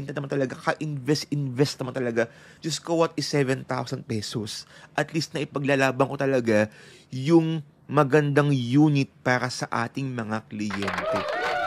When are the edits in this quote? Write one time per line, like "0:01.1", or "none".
none